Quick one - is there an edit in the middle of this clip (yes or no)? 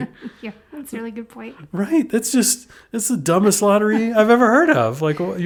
no